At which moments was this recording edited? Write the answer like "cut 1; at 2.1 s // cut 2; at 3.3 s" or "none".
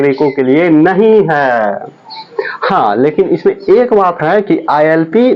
none